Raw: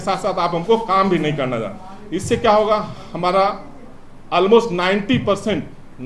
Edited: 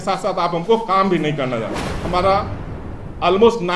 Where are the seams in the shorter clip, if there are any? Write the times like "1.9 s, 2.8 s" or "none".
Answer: 1.9 s